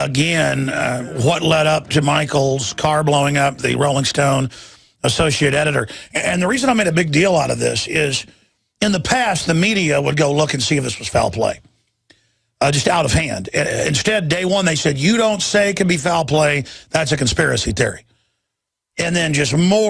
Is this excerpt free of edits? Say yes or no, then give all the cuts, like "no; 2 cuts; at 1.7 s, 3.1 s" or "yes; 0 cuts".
yes; 0 cuts